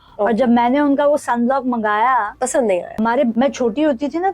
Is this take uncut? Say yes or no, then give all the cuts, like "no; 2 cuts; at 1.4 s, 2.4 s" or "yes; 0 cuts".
no; 1 cut; at 3.2 s